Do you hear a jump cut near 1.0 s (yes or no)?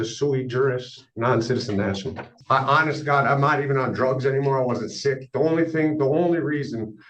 no